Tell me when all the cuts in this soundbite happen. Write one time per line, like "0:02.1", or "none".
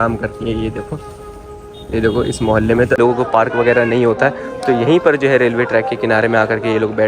0:03.0